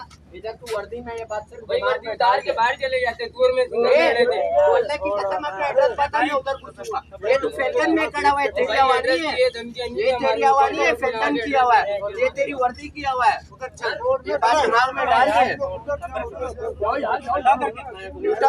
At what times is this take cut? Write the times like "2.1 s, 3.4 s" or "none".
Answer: none

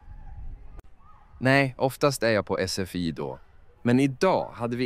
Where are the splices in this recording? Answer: 1.0 s

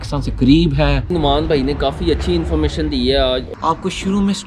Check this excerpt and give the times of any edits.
1.0 s, 3.5 s

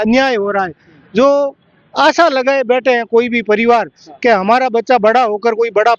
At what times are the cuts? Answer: none

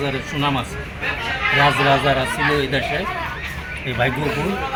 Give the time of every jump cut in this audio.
none

